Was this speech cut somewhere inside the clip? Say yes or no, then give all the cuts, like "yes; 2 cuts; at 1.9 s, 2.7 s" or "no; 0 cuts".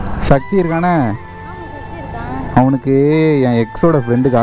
no; 0 cuts